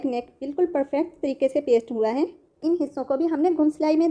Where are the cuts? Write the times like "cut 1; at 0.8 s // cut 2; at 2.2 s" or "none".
cut 1; at 2.6 s